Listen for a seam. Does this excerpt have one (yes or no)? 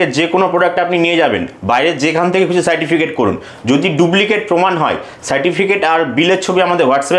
no